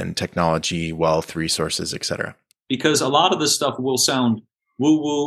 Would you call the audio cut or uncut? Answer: cut